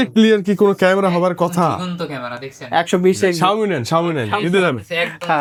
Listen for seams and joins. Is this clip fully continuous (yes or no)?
yes